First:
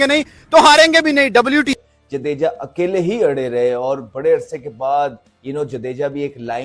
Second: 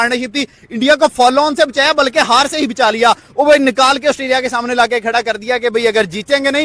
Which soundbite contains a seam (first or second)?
first